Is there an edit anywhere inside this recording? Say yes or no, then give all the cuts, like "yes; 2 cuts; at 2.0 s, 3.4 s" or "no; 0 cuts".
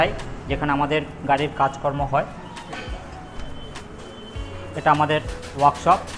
no; 0 cuts